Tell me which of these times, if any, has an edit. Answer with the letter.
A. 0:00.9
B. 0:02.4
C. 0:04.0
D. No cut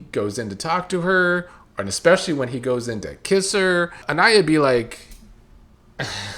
C